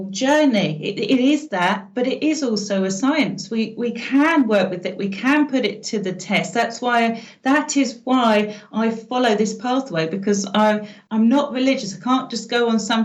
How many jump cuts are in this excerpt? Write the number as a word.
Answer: one